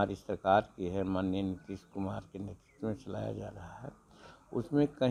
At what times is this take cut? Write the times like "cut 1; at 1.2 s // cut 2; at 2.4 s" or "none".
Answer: none

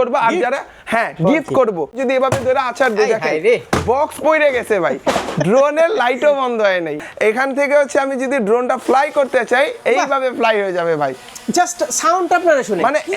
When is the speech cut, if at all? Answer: cut 1; at 2.0 s // cut 2; at 7.0 s

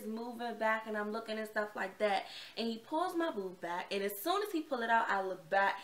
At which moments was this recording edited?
none

